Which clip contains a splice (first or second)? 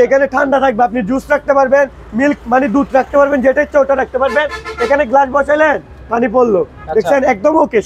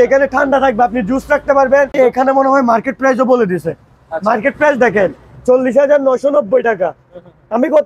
second